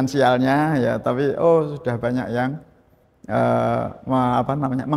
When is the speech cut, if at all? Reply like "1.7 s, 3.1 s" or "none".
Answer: none